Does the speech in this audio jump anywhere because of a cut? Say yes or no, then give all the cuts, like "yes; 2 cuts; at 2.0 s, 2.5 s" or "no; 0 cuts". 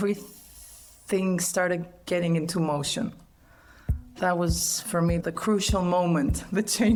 no; 0 cuts